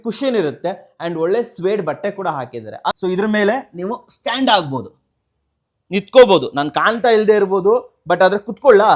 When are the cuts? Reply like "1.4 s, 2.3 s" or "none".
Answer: 2.9 s